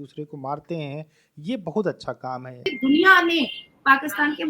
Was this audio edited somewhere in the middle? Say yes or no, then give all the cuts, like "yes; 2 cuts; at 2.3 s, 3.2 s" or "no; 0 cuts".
yes; 1 cut; at 2.7 s